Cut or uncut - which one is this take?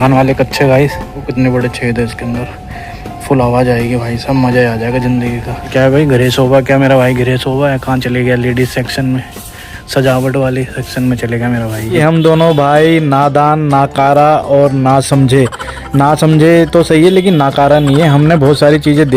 cut